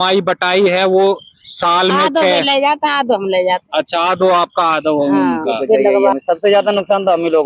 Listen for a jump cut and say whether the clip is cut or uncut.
cut